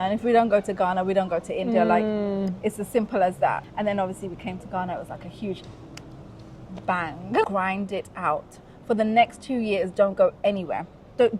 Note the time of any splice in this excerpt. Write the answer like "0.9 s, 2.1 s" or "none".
3.7 s, 7.5 s

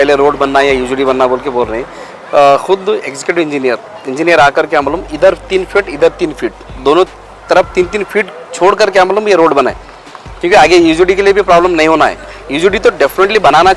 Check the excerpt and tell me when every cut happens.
none

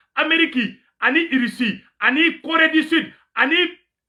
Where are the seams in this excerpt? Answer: none

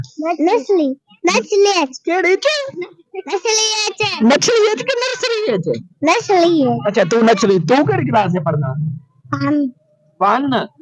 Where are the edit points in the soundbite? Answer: 2.1 s

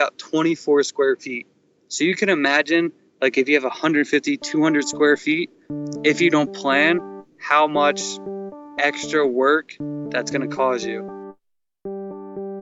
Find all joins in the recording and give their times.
10.8 s

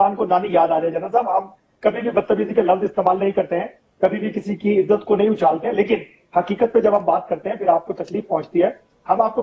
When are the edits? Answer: none

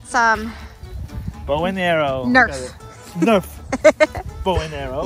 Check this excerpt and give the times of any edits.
none

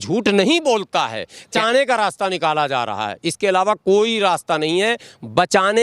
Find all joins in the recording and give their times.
1.5 s

